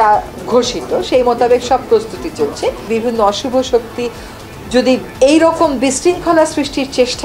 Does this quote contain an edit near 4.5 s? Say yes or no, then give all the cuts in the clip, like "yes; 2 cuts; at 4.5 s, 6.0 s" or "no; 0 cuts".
no; 1 cut; at 2.8 s